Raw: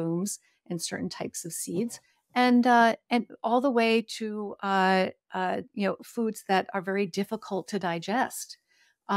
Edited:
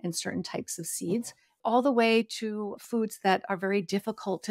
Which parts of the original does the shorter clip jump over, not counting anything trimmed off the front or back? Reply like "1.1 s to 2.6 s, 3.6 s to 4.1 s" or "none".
2.2 s to 3.3 s, 4.6 s to 6.0 s